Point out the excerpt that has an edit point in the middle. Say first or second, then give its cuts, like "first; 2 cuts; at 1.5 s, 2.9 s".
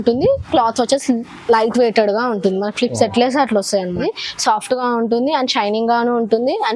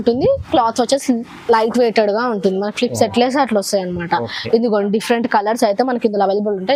first; 1 cut; at 4.0 s